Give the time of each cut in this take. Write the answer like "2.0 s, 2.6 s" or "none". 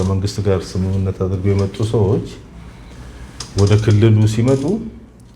none